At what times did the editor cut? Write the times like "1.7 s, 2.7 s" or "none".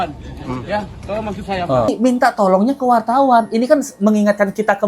1.9 s